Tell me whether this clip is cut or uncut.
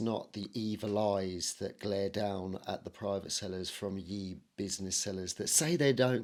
uncut